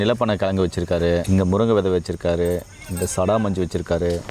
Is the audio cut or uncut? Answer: cut